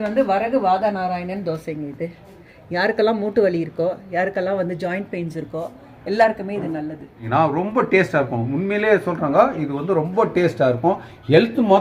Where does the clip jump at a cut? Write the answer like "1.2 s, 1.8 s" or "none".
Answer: 2.5 s, 7.2 s